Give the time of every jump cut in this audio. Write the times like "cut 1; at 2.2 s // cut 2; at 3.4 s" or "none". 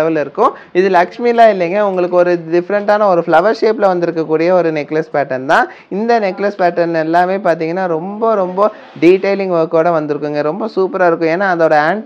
none